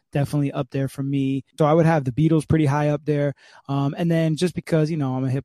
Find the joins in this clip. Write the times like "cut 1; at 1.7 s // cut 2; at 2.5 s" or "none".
cut 1; at 1.5 s